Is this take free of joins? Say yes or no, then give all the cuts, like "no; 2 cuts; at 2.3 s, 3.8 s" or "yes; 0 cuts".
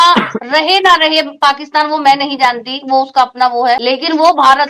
no; 1 cut; at 3.8 s